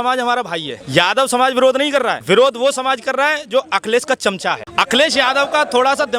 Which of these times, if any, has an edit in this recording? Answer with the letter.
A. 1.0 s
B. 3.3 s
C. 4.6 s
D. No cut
C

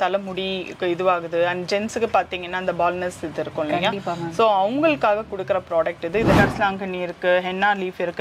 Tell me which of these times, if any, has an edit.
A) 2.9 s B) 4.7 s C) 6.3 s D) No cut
C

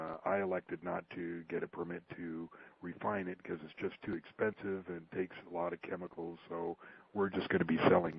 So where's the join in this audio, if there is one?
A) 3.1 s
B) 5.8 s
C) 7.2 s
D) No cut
A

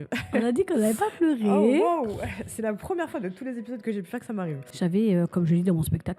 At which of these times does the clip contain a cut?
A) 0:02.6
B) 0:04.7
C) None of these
B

